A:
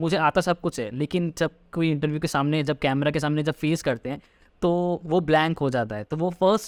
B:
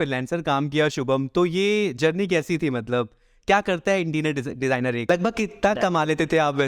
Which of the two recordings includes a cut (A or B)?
B